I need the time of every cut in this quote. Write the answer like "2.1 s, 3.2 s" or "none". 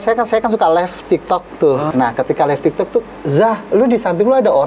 1.9 s, 3.0 s